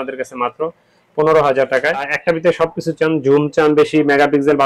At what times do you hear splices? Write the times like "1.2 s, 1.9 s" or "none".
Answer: 2.1 s

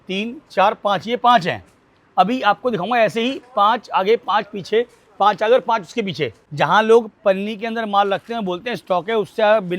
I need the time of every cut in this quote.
6.4 s

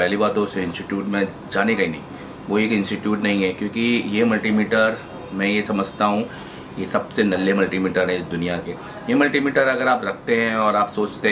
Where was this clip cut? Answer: none

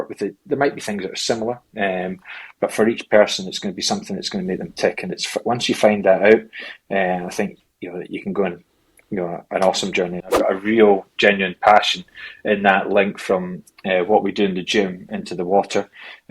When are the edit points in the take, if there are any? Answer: 10.3 s

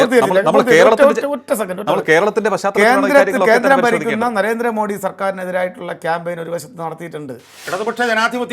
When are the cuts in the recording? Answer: 7.6 s

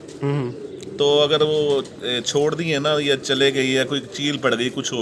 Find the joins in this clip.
none

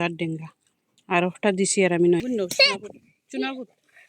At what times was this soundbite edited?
2.2 s

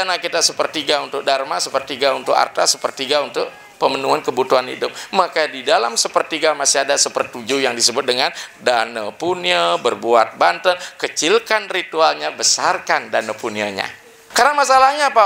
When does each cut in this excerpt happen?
14.2 s

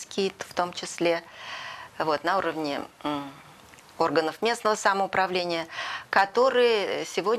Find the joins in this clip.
none

